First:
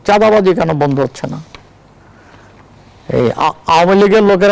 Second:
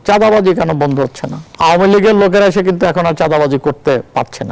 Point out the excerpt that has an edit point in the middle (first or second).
second